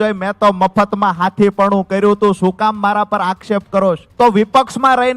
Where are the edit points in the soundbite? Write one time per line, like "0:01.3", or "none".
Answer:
0:04.1